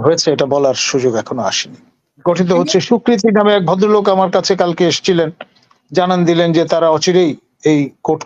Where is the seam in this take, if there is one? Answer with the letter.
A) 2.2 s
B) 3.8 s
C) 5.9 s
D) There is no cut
A